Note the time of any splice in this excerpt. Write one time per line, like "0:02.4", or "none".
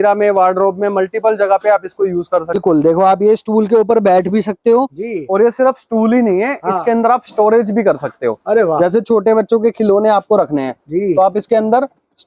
0:02.6